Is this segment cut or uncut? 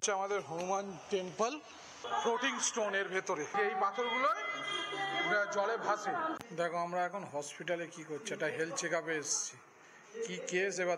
cut